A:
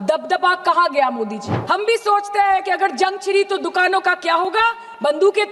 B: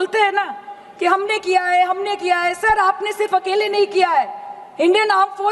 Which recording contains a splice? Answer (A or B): A